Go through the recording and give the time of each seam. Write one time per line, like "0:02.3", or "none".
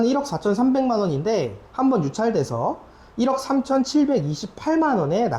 none